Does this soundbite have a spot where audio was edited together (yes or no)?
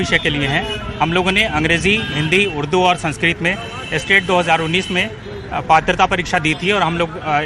no